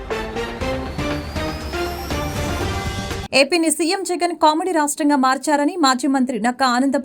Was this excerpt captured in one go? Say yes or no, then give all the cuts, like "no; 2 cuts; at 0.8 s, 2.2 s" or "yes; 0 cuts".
no; 1 cut; at 3.2 s